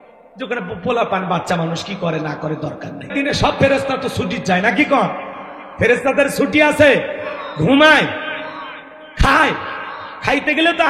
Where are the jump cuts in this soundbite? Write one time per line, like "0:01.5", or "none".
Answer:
0:03.1